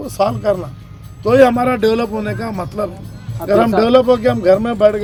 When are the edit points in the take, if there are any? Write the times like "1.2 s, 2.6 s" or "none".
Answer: none